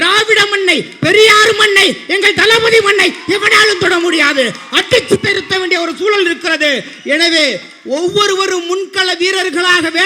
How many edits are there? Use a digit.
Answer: 0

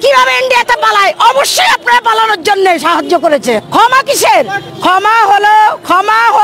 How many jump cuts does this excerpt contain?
1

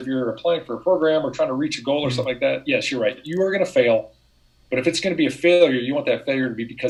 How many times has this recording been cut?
0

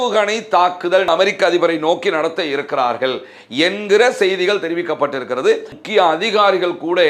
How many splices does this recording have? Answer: 2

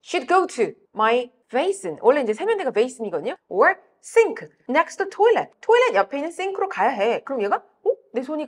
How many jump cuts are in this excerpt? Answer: 0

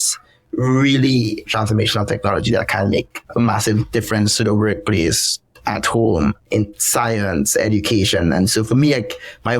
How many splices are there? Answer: 1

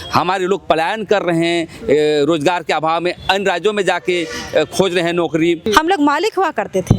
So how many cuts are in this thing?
1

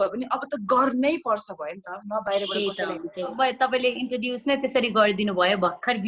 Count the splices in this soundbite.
1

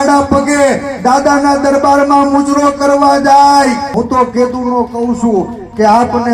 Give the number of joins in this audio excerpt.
1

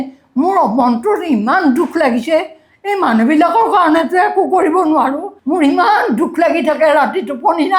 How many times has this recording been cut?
1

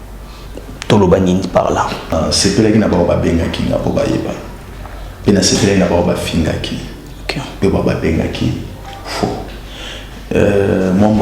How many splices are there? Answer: 1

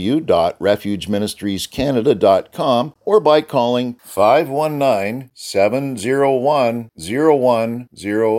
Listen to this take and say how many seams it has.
1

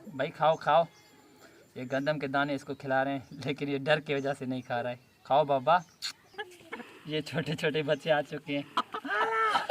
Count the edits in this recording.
0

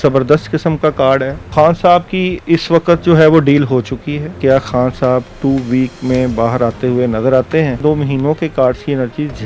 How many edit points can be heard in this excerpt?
3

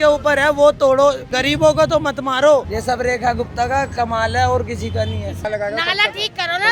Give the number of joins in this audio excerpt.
3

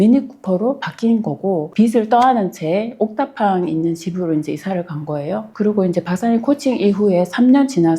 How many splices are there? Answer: 1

